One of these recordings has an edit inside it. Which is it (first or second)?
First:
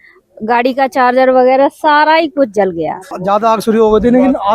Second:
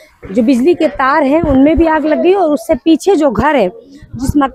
first